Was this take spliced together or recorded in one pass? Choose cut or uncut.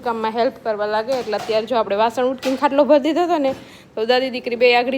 uncut